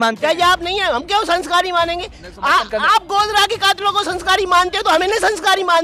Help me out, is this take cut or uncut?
uncut